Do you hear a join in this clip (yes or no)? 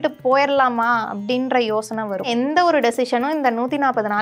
yes